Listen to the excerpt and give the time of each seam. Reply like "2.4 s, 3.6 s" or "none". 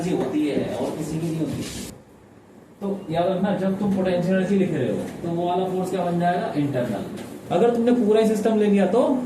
1.9 s, 7.4 s

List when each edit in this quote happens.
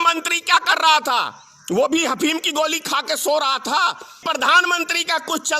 4.2 s

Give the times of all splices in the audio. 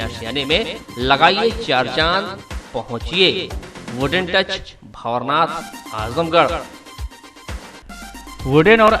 7.8 s

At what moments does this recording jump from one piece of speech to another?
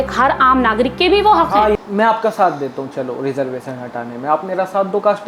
1.7 s

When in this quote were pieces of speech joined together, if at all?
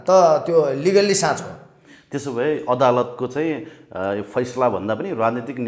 none

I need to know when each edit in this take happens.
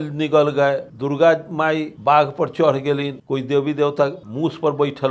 0.9 s, 1.9 s, 3.2 s, 4.2 s

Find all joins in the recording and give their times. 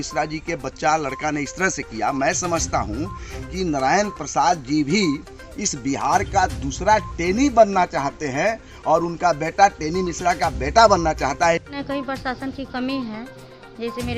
11.7 s

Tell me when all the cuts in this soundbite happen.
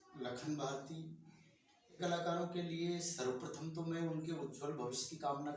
2.0 s

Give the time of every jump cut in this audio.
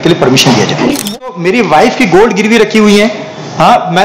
1.2 s

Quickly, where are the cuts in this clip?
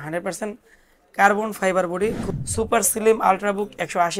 2.2 s

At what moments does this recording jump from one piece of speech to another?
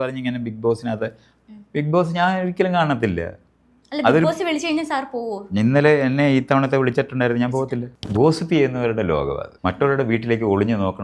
7.9 s, 9.5 s

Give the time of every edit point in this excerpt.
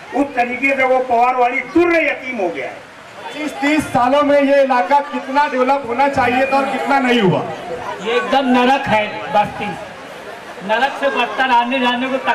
3.2 s

